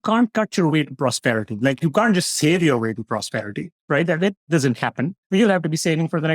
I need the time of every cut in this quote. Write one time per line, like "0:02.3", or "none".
0:05.2